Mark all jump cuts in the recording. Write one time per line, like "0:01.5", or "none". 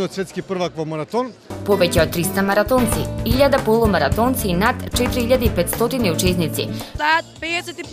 0:01.5
0:06.9

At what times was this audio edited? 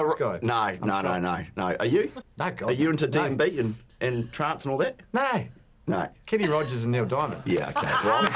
0:02.2
0:03.8

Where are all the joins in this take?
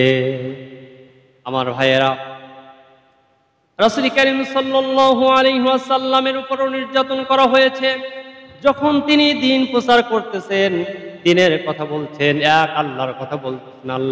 none

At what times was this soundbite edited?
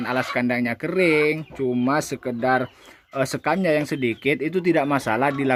none

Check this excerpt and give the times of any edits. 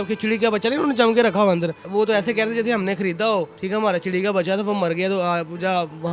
0:01.8
0:03.6

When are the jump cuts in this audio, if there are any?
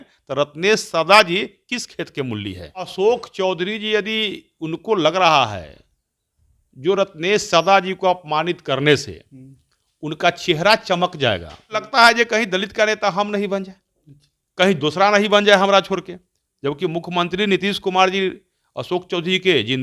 0:02.9
0:11.9

